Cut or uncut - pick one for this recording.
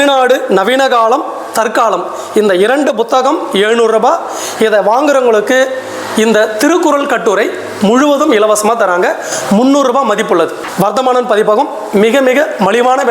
cut